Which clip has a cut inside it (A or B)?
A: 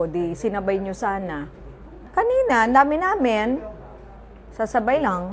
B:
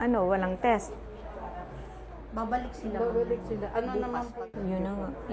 B